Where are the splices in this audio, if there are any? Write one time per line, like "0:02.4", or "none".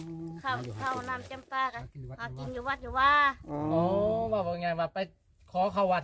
0:01.8